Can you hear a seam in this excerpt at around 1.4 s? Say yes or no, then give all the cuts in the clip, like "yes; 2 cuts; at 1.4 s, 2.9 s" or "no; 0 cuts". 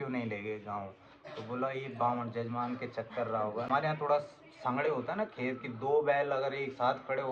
no; 1 cut; at 3.7 s